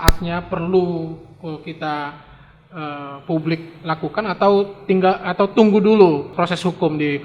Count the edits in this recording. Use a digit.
1